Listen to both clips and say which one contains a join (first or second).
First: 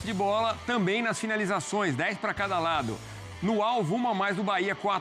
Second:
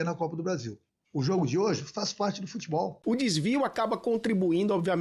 second